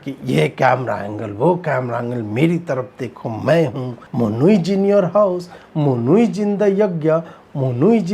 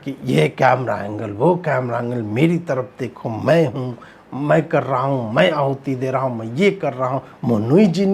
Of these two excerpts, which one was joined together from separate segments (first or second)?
first